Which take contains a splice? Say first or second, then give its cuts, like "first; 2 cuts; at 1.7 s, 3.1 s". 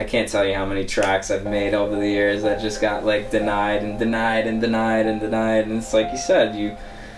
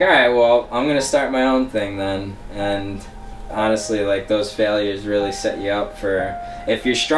second; 1 cut; at 3.5 s